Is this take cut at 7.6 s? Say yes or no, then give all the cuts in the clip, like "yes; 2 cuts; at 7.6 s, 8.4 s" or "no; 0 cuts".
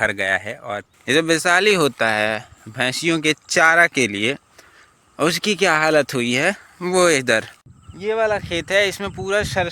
yes; 2 cuts; at 0.9 s, 7.6 s